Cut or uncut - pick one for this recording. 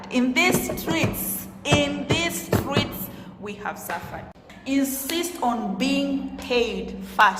cut